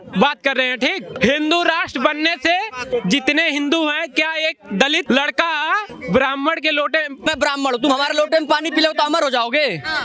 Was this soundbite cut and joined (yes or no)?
yes